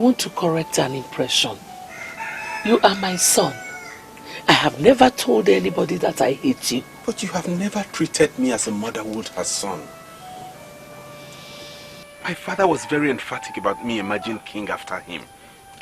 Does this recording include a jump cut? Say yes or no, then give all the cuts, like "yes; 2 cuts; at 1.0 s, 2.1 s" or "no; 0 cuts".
no; 0 cuts